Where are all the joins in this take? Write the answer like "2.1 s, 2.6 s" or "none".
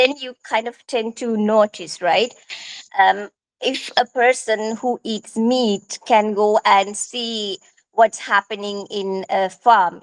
none